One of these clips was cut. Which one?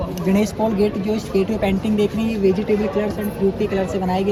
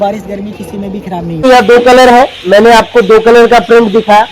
second; 1 cut; at 1.4 s

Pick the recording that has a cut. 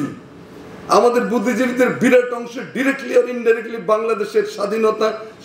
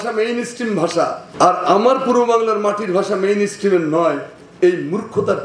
second; 1 cut; at 1.2 s

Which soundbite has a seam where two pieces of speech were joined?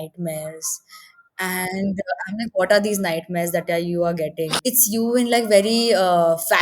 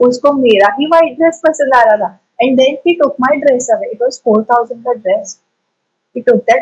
first; 1 cut; at 4.6 s

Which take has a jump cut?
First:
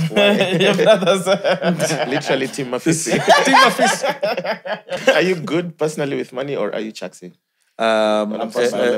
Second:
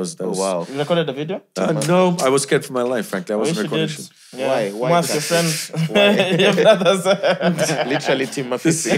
first; 1 cut; at 5.0 s

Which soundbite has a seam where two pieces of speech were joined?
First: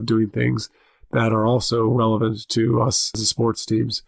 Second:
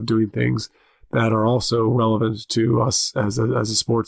first; 1 cut; at 3.1 s

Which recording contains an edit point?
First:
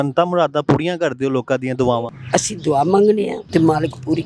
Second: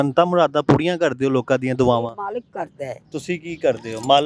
first; 2 cuts; at 2.2 s, 3.4 s

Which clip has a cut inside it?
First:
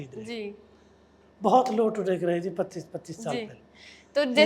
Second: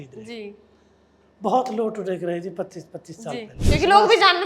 second; 1 cut; at 3.6 s

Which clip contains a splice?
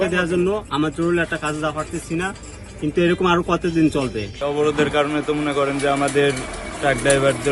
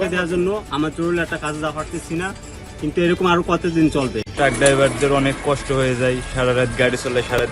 second; 1 cut; at 4.2 s

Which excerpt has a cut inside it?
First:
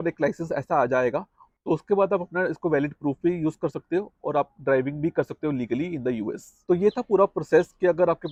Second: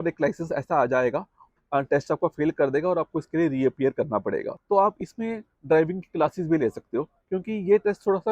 second; 3 cuts; at 1.5 s, 4.5 s, 7.2 s

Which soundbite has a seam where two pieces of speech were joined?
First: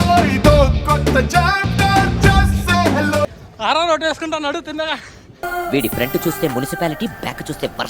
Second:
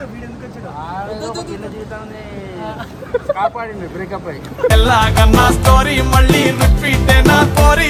first; 1 cut; at 3.4 s

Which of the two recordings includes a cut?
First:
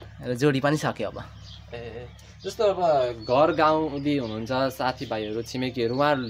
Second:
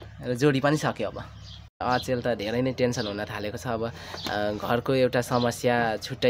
second; 1 cut; at 1.8 s

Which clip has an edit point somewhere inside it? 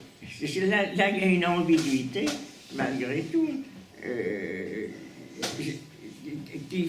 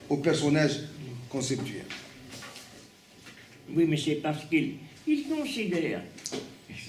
first; 1 cut; at 3.3 s

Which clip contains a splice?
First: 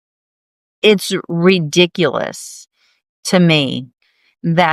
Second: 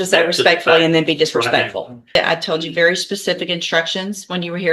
second; 1 cut; at 2.2 s

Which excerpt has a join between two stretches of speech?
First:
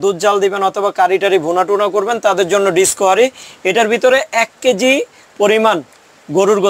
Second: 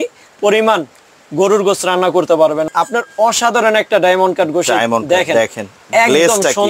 second; 1 cut; at 2.7 s

